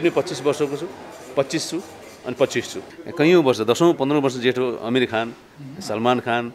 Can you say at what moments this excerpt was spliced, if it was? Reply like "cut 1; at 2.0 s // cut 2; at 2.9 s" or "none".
cut 1; at 2.9 s

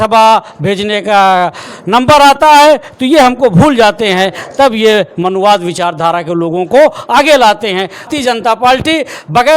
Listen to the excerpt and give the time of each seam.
cut 1; at 8.1 s

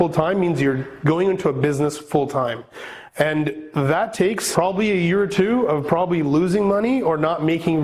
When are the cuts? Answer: cut 1; at 4.5 s

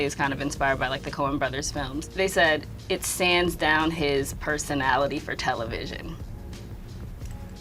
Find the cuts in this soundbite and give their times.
cut 1; at 2.1 s

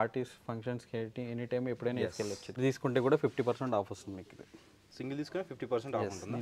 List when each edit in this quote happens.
cut 1; at 2.6 s

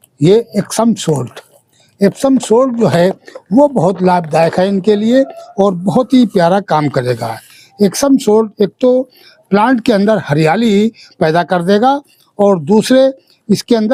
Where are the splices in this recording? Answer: none

